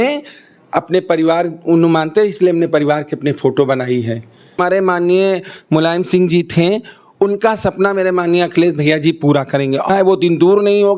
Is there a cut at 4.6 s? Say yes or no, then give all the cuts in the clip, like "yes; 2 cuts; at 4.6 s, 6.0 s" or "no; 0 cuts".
yes; 2 cuts; at 4.6 s, 9.9 s